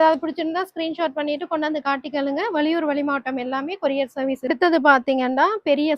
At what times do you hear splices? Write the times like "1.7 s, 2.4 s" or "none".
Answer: 4.5 s